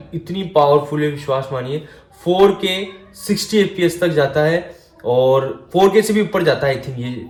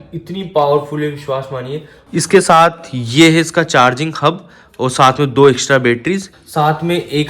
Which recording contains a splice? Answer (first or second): second